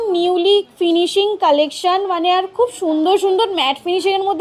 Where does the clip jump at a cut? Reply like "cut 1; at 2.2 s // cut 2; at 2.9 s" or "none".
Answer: none